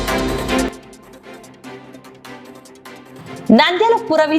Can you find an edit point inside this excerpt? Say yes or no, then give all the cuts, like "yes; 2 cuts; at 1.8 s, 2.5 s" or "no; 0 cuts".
yes; 1 cut; at 3.2 s